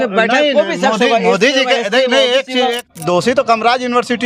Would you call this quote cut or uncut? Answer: cut